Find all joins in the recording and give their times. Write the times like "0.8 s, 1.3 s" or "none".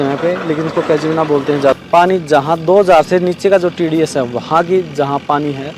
1.7 s